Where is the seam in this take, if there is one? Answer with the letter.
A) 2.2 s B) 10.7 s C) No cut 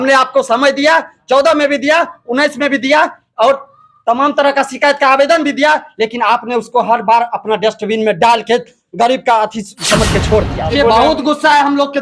B